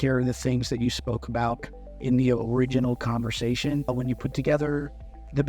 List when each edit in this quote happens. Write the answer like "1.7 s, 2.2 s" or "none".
3.9 s